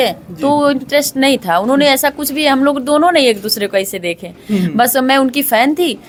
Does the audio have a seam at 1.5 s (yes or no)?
no